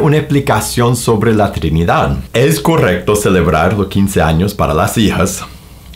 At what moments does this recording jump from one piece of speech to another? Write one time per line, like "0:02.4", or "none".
0:02.2